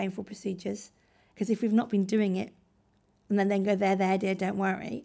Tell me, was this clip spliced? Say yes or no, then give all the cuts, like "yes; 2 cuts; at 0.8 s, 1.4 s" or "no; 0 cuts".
yes; 1 cut; at 1.3 s